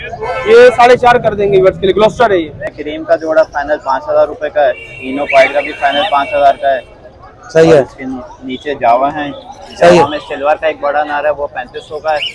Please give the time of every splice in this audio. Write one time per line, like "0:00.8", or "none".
0:02.6